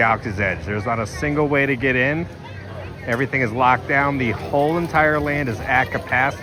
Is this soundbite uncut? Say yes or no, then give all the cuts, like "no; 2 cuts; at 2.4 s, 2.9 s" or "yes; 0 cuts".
yes; 0 cuts